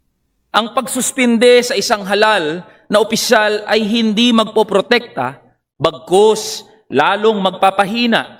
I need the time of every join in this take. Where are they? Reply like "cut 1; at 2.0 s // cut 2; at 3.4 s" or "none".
none